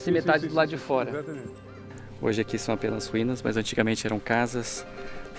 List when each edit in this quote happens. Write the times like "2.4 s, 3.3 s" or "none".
1.7 s